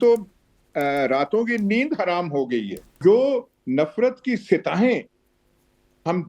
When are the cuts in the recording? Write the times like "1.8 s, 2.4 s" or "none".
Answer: 3.0 s